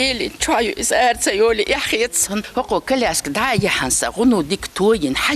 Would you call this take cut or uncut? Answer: cut